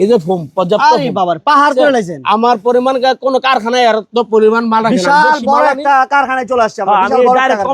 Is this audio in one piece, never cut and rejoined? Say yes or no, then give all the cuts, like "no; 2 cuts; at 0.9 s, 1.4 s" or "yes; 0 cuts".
yes; 0 cuts